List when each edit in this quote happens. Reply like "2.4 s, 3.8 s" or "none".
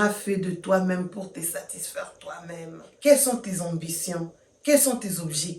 2.9 s